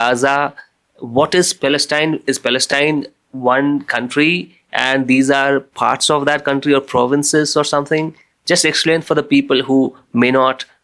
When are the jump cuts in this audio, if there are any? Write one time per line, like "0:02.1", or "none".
none